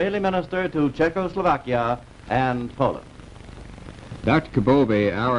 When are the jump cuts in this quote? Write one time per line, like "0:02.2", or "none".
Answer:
none